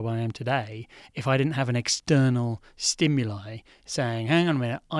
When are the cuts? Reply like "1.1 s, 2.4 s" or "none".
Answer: none

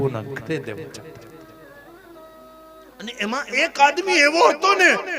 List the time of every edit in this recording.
none

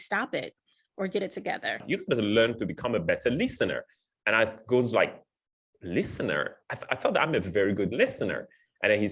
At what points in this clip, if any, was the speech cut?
1.8 s

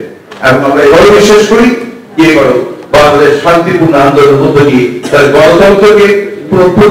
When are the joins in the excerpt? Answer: none

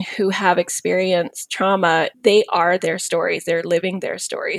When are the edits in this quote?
2.1 s

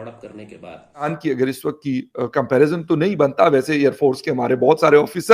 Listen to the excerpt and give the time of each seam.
1.1 s

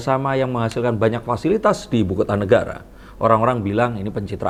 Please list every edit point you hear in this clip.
none

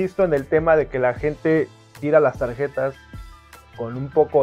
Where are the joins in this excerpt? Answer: none

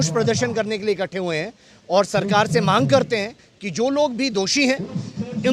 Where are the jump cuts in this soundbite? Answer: none

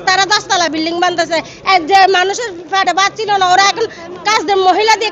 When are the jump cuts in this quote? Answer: none

